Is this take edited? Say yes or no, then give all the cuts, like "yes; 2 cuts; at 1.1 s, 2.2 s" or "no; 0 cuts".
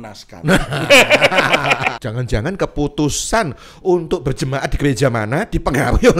yes; 1 cut; at 2.0 s